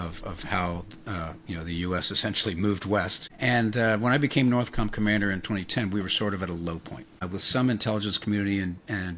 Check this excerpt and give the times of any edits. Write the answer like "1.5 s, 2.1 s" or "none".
3.2 s, 7.2 s